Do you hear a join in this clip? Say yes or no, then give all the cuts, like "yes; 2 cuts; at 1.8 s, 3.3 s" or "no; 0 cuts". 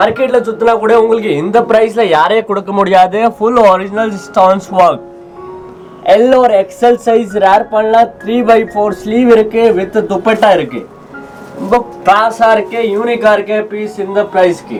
no; 0 cuts